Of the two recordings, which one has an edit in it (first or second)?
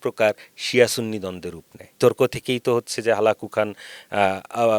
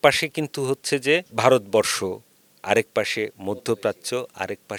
first